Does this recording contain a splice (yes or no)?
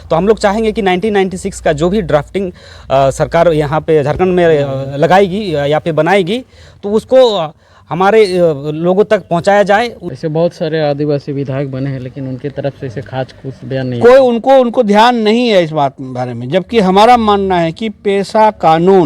yes